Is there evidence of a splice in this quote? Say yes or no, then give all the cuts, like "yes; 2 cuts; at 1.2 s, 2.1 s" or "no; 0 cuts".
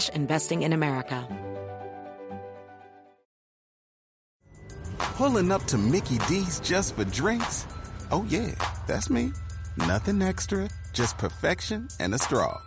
yes; 1 cut; at 1.2 s